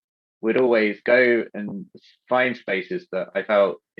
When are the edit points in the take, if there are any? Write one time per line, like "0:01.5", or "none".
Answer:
none